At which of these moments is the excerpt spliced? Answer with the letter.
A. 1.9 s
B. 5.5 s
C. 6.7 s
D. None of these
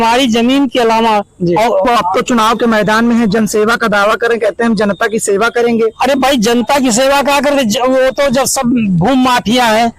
A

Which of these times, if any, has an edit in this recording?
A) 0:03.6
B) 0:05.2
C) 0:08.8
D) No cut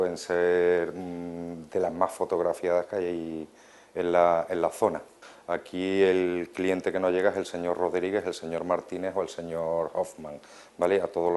B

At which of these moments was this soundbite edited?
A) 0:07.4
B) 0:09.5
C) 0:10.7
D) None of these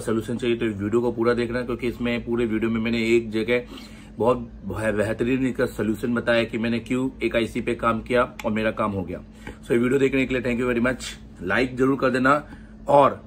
D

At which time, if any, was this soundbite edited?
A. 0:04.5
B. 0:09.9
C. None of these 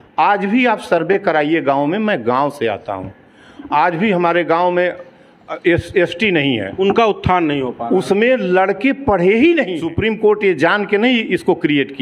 B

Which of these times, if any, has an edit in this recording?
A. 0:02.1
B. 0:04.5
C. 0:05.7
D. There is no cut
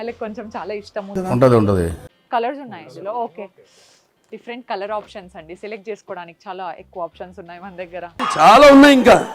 A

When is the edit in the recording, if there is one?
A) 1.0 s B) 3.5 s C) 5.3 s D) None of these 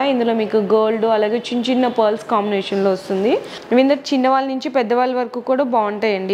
B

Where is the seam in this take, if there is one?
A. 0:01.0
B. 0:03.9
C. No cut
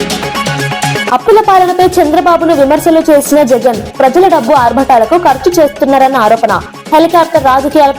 A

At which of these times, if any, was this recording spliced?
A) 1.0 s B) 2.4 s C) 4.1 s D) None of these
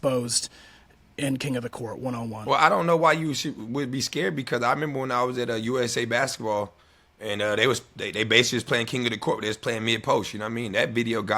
B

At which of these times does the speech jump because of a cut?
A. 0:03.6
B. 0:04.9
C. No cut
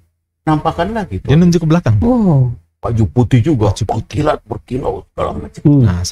C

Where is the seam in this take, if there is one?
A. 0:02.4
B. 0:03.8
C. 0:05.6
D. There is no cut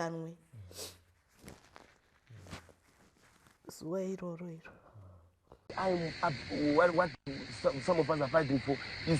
C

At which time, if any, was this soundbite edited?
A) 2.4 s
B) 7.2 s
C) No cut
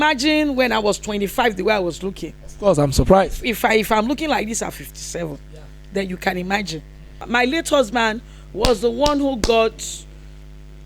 B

